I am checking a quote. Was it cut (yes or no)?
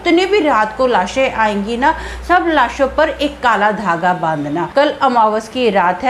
yes